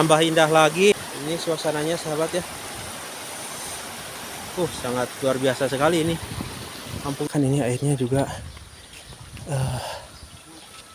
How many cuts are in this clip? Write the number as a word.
two